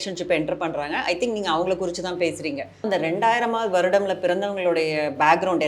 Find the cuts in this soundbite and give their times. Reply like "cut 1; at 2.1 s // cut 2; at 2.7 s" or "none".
cut 1; at 2.8 s